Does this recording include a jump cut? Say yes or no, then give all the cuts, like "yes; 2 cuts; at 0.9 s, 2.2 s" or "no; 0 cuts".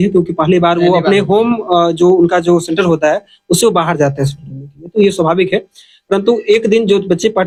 no; 0 cuts